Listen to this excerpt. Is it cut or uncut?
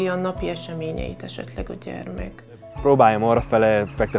cut